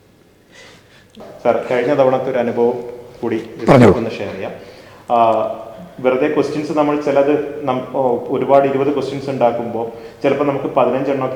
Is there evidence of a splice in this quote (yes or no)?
yes